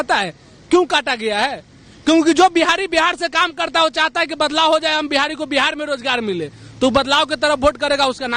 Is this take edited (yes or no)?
no